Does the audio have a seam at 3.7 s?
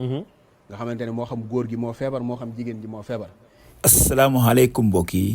yes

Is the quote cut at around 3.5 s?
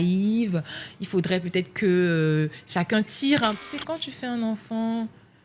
yes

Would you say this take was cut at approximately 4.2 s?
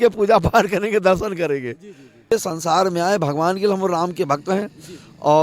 no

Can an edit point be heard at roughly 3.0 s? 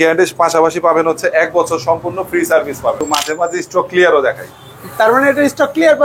yes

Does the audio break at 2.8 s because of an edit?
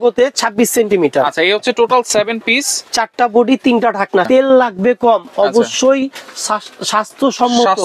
no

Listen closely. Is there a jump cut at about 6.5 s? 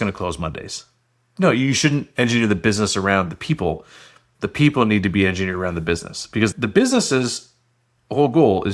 yes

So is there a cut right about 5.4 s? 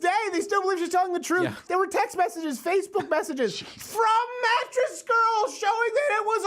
no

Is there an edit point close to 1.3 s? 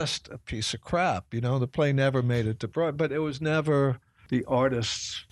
no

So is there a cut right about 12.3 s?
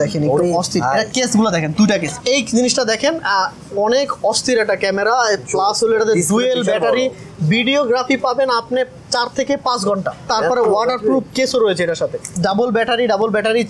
yes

